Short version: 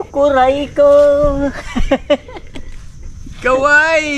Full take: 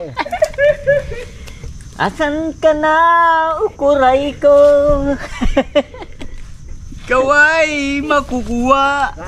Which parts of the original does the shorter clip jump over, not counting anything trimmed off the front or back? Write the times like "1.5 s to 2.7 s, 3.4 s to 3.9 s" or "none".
none